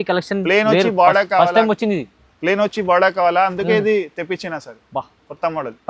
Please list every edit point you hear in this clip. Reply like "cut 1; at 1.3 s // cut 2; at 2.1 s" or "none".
none